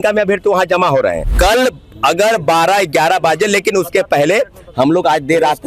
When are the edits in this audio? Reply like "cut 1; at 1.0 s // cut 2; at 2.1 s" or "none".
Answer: cut 1; at 1.3 s